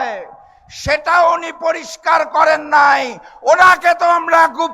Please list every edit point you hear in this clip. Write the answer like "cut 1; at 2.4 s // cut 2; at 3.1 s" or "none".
none